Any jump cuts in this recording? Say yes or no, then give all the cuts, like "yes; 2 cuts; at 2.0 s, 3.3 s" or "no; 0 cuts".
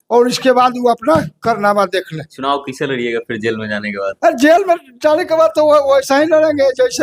no; 0 cuts